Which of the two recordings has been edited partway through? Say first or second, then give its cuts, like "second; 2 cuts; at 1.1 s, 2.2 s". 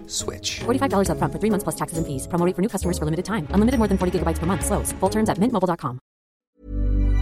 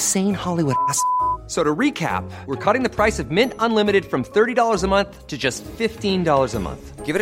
first; 1 cut; at 6.3 s